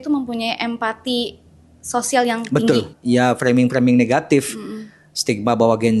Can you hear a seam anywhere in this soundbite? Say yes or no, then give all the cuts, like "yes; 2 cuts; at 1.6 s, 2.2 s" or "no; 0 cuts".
yes; 1 cut; at 2.9 s